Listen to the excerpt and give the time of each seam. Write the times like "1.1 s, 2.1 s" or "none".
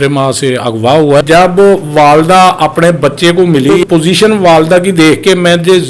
1.2 s, 3.8 s